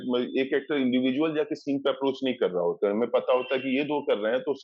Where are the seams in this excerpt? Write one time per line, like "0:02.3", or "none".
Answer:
none